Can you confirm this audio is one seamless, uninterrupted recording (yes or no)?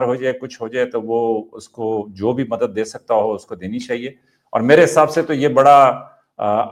yes